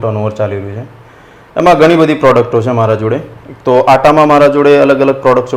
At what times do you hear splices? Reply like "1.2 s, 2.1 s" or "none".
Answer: none